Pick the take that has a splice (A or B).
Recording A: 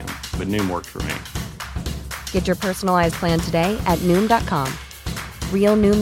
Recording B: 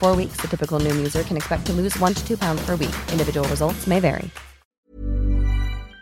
B